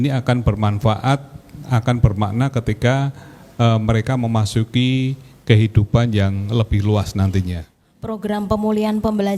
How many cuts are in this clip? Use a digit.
1